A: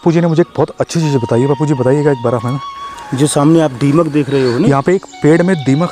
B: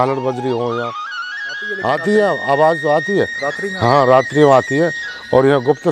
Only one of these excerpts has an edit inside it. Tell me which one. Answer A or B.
B